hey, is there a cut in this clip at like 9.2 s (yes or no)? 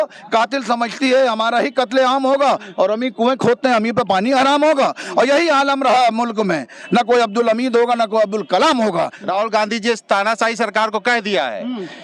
yes